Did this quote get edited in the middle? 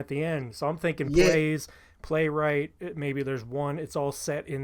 no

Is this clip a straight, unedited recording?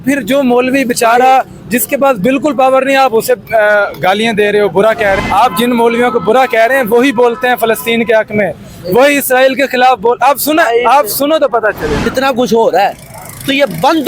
no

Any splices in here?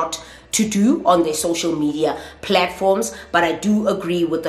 no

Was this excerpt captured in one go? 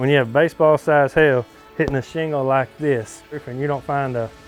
yes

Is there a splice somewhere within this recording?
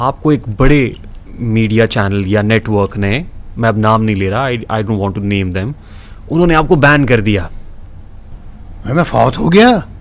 no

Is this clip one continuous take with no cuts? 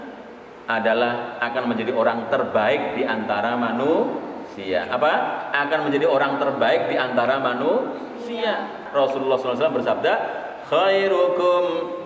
no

